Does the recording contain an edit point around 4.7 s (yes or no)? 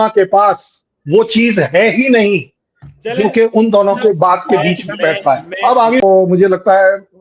no